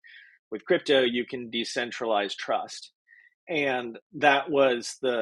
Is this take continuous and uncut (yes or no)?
yes